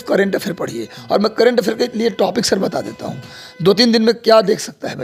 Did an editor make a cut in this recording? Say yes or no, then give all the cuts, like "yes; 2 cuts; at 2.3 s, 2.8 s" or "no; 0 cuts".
no; 0 cuts